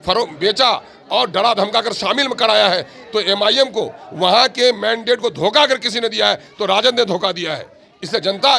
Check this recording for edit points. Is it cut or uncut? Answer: uncut